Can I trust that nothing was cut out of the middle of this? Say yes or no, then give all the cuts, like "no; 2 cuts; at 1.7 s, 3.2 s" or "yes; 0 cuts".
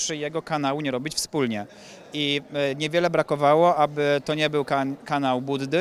yes; 0 cuts